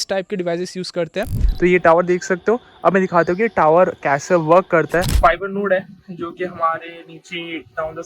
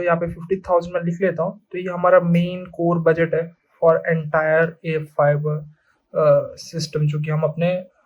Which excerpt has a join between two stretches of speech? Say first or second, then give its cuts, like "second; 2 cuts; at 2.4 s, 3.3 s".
first; 2 cuts; at 1.4 s, 5.1 s